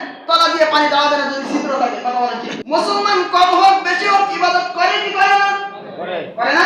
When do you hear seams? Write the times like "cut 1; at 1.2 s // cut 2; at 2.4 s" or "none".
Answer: cut 1; at 2.5 s